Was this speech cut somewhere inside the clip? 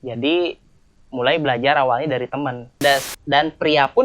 yes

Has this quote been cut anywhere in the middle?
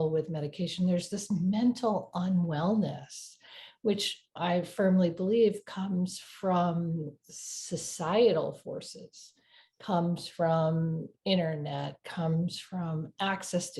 yes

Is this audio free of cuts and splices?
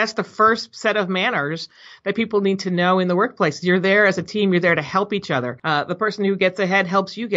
no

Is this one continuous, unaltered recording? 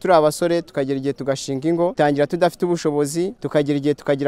no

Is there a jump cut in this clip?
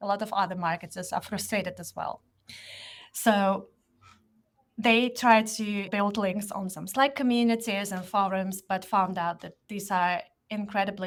no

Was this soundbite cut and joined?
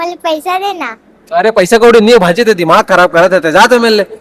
no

